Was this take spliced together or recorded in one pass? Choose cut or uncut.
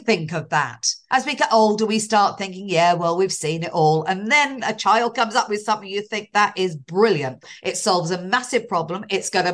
cut